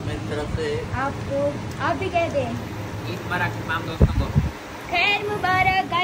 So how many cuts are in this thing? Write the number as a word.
zero